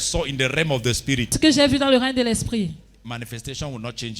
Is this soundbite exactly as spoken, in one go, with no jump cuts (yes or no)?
no